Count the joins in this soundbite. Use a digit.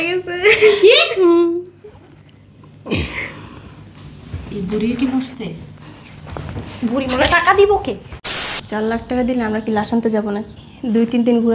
1